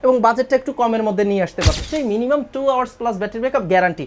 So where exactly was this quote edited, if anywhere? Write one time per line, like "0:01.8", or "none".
0:01.8